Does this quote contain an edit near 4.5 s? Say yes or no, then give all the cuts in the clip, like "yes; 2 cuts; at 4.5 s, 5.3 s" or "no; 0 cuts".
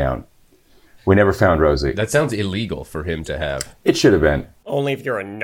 yes; 1 cut; at 4.5 s